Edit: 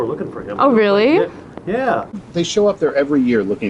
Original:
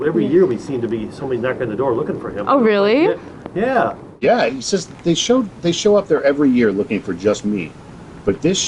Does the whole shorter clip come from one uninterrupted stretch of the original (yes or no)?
no